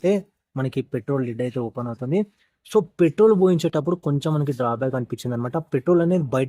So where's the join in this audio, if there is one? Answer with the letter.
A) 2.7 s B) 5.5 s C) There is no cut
C